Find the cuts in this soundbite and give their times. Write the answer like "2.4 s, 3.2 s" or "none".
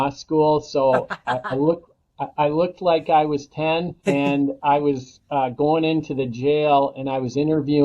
4.1 s

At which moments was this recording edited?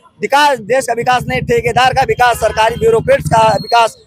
none

